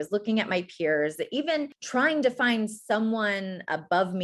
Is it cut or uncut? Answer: cut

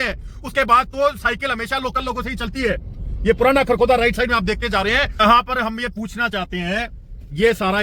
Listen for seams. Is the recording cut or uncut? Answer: cut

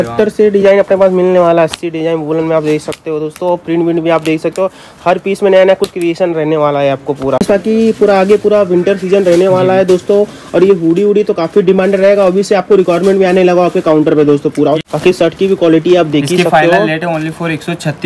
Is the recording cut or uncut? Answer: cut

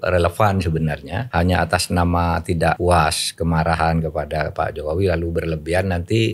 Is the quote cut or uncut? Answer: cut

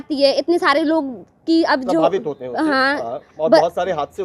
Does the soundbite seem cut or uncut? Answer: uncut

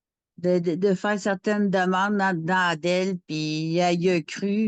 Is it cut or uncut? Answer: uncut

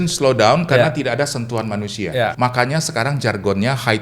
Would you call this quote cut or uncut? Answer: cut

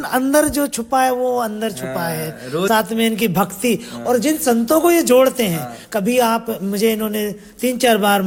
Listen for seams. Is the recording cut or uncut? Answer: uncut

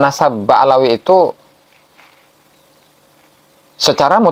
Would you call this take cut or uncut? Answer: uncut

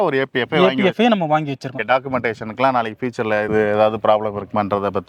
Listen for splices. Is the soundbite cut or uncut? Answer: uncut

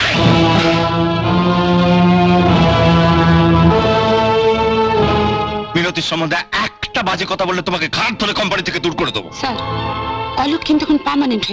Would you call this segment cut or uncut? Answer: uncut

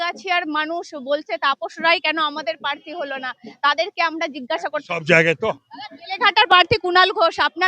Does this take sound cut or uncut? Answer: cut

